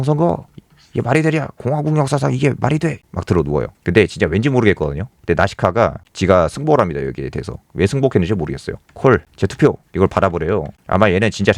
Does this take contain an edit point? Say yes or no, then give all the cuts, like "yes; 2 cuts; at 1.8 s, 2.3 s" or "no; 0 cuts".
yes; 3 cuts; at 3.0 s, 6.0 s, 8.8 s